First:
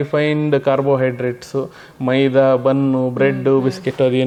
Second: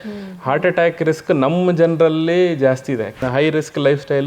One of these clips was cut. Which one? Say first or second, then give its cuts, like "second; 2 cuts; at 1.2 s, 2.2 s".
second; 1 cut; at 3.2 s